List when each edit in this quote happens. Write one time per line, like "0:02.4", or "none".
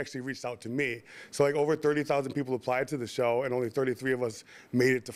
none